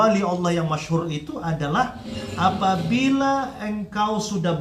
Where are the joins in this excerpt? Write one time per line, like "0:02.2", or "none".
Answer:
none